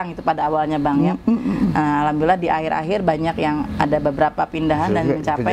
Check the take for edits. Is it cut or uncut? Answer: uncut